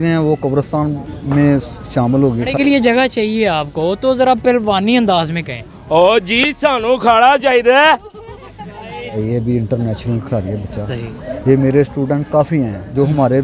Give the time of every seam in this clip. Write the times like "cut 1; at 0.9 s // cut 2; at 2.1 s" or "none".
cut 1; at 2.5 s // cut 2; at 9.2 s